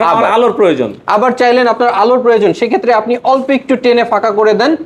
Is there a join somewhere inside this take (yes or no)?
no